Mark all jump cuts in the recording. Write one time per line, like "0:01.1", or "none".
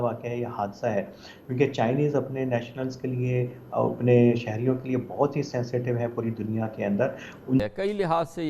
0:07.6

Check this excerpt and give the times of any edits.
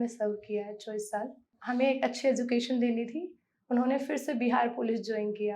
0:01.5

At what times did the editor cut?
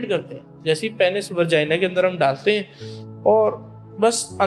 none

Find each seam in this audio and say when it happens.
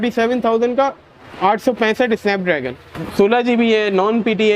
0:03.0

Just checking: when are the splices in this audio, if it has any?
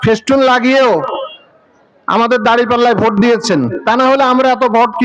none

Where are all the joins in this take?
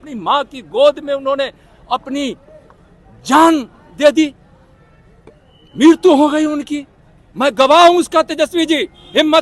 none

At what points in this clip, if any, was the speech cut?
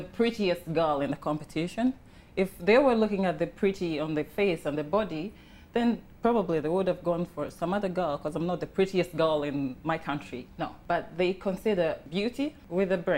0:10.8
0:12.3

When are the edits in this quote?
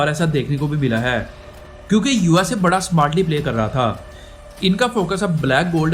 0:01.5

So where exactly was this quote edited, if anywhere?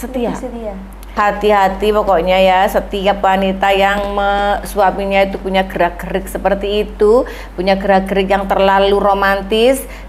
0:01.2

